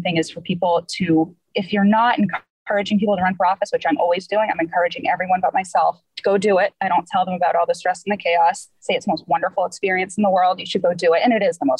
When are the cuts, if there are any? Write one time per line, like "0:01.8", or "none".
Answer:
none